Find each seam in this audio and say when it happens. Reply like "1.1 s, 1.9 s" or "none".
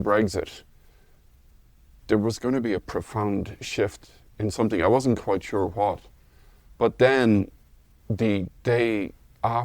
2.0 s